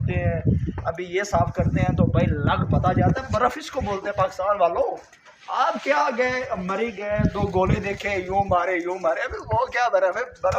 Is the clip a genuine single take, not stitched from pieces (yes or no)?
yes